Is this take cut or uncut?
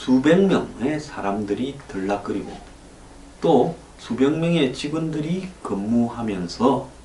uncut